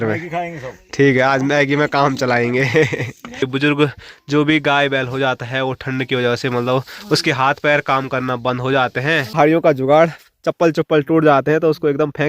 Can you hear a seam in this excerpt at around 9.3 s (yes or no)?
yes